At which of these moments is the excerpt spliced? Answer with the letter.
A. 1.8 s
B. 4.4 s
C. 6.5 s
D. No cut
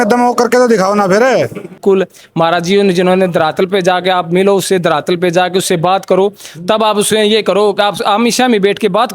A